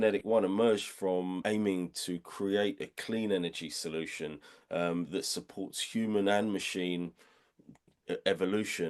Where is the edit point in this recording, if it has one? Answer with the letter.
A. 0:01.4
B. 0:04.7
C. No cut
A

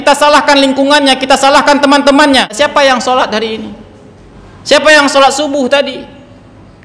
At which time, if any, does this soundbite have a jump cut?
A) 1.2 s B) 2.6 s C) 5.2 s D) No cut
B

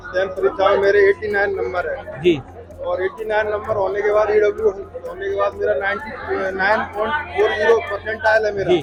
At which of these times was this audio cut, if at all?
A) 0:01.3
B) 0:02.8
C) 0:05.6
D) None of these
D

